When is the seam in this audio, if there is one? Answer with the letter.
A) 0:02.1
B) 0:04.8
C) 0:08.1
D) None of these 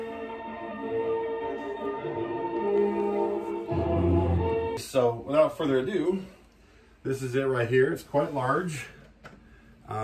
B